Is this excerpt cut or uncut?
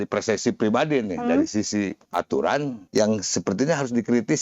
cut